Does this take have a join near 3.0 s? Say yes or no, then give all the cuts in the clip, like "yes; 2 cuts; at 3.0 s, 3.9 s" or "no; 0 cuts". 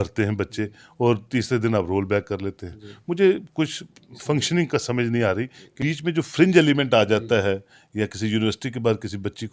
no; 1 cut; at 5.8 s